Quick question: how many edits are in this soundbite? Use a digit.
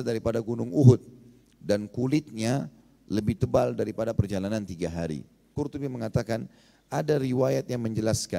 1